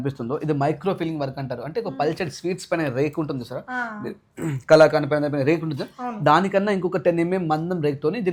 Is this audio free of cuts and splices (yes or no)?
yes